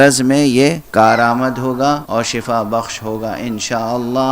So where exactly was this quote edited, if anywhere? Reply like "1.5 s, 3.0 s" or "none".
0.8 s, 2.0 s